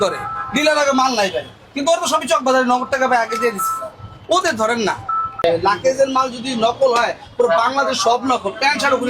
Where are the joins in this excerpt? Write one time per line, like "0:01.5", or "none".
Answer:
0:05.4